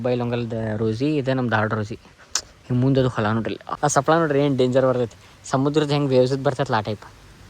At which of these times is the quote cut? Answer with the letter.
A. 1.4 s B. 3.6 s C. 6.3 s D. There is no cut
B